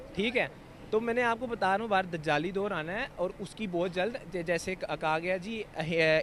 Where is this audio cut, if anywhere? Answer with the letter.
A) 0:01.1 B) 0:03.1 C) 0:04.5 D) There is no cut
D